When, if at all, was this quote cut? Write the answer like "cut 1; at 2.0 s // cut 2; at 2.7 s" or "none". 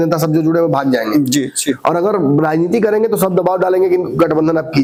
none